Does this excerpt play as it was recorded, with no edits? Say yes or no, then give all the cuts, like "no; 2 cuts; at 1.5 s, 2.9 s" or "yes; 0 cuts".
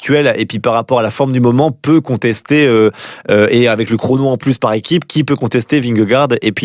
yes; 0 cuts